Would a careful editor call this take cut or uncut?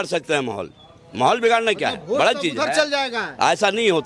uncut